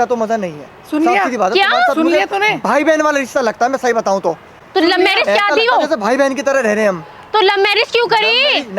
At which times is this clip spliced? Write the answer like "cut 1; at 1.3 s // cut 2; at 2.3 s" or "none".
none